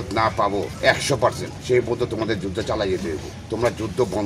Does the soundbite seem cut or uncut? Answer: cut